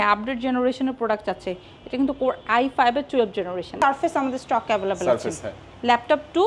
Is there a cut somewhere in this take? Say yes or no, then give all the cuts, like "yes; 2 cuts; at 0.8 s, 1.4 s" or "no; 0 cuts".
yes; 1 cut; at 3.8 s